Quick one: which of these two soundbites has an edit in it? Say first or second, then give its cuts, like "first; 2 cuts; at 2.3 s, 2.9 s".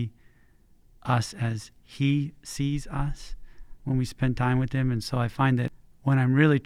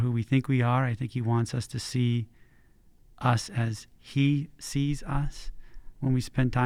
first; 1 cut; at 5.7 s